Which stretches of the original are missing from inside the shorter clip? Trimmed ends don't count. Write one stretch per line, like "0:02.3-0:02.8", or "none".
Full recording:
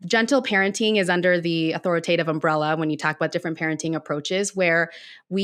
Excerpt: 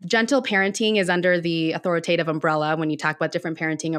none